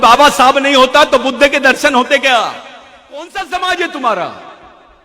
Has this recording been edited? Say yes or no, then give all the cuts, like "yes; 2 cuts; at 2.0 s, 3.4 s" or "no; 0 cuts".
yes; 1 cut; at 3.3 s